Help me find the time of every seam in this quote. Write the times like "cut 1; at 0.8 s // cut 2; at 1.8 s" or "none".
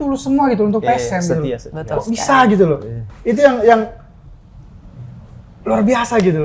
none

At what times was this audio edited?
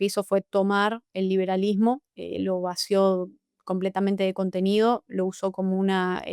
none

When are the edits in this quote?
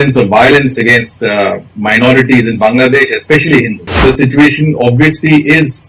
cut 1; at 4.0 s

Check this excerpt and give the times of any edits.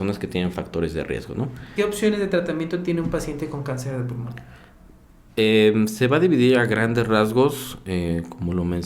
cut 1; at 1.7 s

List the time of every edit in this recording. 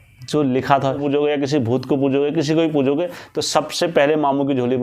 cut 1; at 1.0 s

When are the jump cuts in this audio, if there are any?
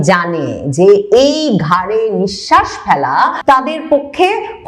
cut 1; at 3.4 s

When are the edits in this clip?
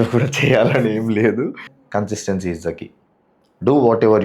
cut 1; at 1.7 s

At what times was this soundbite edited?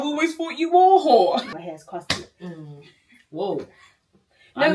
cut 1; at 1.5 s

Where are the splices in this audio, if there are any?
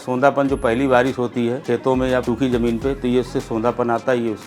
cut 1; at 1.9 s

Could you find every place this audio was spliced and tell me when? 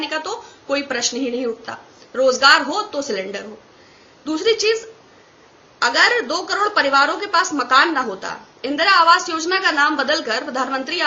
none

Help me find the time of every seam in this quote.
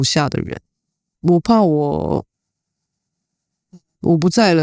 cut 1; at 1.1 s

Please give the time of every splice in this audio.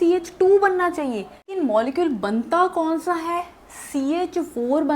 cut 1; at 1.6 s

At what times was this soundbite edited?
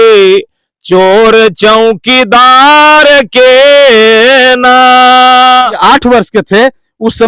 cut 1; at 5.6 s

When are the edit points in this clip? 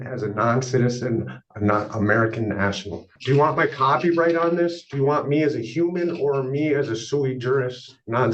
cut 1; at 3.2 s

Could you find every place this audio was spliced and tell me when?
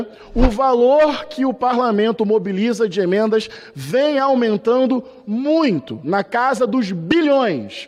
none

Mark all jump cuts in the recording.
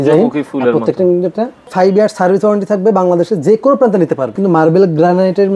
cut 1; at 1.7 s // cut 2; at 4.4 s

